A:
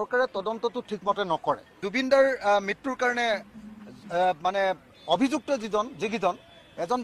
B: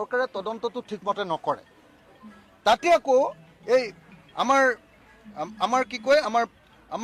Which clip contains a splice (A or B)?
A